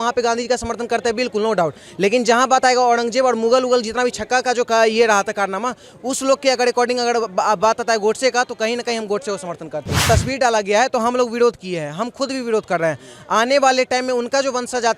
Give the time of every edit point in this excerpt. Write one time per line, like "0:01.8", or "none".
0:10.0